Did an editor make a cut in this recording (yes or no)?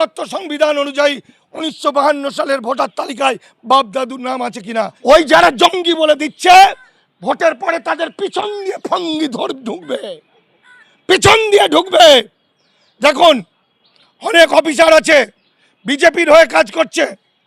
yes